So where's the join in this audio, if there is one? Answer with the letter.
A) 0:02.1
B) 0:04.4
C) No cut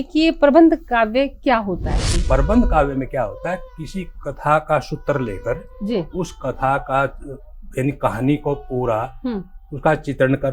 A